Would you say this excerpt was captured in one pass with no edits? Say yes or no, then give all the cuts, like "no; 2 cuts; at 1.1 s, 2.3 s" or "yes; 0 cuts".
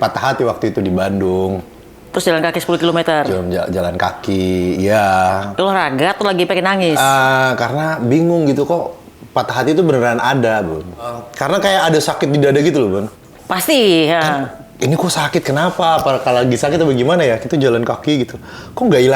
no; 1 cut; at 11.3 s